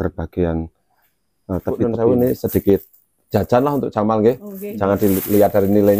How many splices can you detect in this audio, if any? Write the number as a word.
one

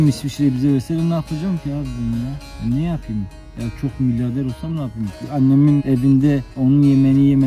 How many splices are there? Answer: two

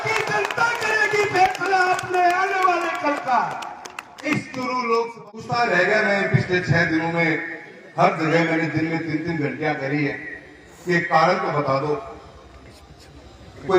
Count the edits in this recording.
one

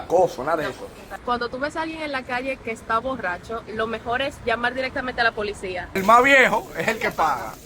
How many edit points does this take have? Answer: two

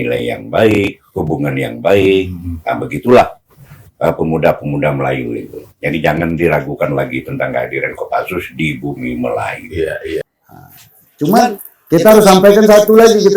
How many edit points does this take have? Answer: one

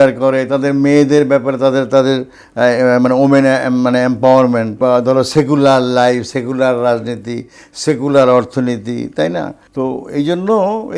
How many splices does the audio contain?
two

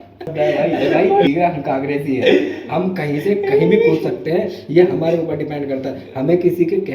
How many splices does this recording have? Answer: one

